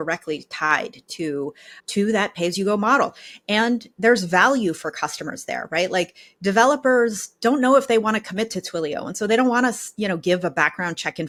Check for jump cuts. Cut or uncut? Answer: uncut